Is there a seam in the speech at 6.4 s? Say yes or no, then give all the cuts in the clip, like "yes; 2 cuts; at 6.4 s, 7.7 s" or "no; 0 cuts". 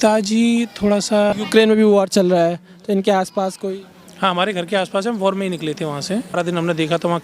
yes; 2 cuts; at 1.3 s, 6.4 s